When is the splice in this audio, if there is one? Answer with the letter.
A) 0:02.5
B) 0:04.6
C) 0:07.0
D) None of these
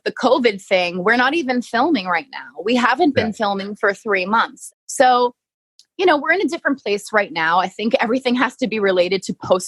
B